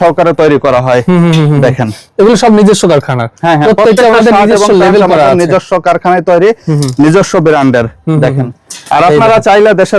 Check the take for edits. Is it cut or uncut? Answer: uncut